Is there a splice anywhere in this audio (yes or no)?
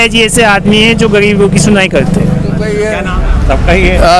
yes